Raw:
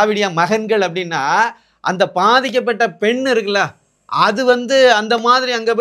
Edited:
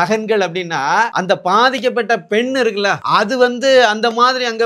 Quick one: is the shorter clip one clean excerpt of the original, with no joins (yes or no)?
no